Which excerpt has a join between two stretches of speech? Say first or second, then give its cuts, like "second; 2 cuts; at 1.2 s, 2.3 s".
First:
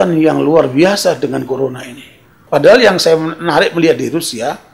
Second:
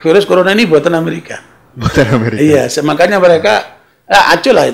first; 1 cut; at 2.3 s